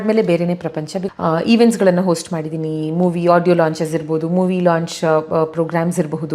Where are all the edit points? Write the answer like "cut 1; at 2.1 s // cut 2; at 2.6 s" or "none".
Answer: cut 1; at 0.9 s